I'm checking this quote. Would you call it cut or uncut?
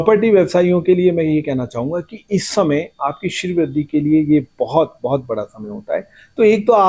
uncut